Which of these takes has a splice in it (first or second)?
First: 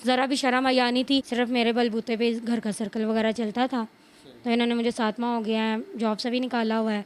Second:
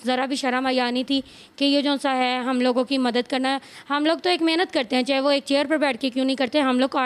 first